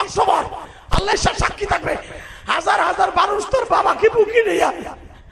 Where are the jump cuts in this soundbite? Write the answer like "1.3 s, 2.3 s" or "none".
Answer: 1.1 s

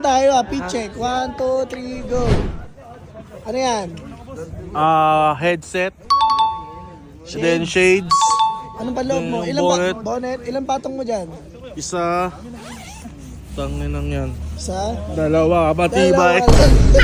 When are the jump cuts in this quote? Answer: none

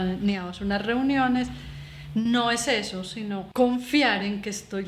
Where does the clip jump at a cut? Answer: 3.4 s

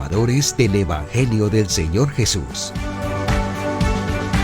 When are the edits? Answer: 2.6 s

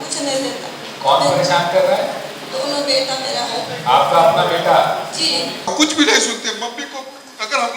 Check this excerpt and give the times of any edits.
5.7 s

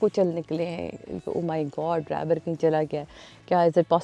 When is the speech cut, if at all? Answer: 1.2 s

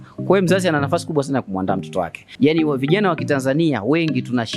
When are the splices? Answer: 2.2 s

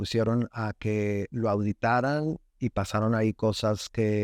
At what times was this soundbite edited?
none

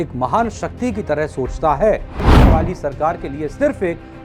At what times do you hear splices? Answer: 2.3 s

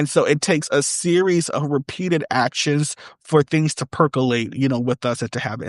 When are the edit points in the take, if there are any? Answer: none

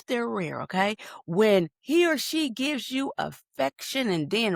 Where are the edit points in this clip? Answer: none

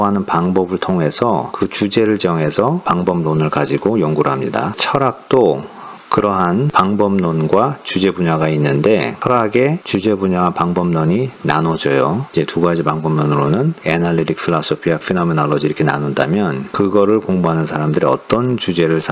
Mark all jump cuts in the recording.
none

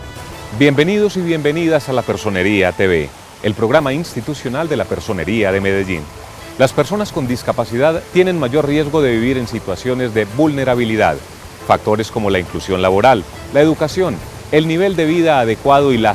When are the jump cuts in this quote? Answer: 1.4 s

